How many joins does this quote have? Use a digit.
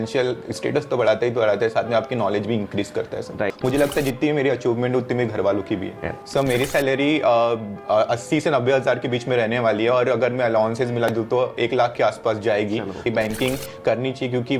3